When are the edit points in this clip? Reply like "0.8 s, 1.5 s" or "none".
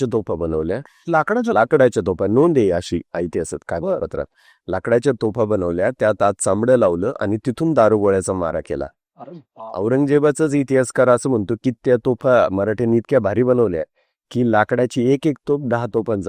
none